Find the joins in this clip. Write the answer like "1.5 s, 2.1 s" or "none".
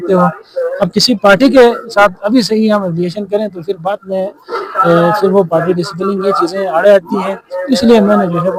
none